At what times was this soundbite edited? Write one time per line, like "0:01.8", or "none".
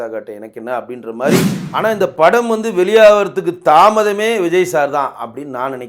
0:01.6